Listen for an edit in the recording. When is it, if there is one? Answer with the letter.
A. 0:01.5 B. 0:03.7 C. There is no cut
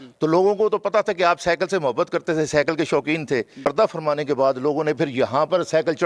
B